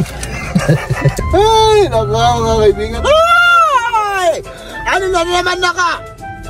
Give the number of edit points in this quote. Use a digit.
1